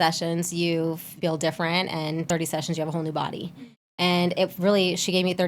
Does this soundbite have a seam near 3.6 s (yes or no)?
no